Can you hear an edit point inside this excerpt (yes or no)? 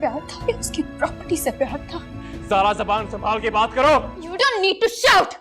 yes